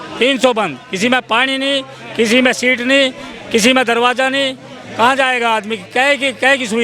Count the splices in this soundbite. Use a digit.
0